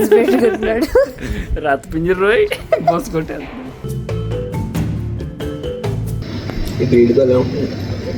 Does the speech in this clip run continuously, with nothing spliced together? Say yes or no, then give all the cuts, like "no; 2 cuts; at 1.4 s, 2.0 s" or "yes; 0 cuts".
yes; 0 cuts